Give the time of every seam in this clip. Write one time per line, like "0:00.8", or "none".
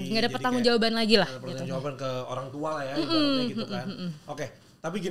none

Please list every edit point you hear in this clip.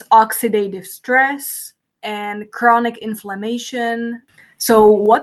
0:02.0
0:04.3

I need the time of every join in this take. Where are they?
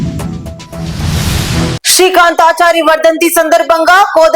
none

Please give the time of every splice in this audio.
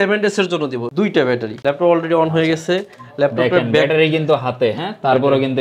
0:01.2

